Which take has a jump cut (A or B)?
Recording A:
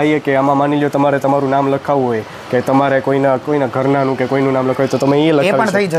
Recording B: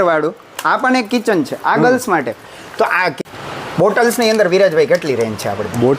B